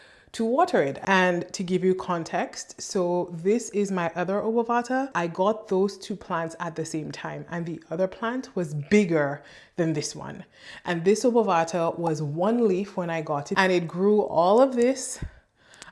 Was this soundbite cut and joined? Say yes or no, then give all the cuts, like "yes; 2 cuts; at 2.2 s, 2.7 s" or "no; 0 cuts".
yes; 3 cuts; at 1.0 s, 5.1 s, 13.4 s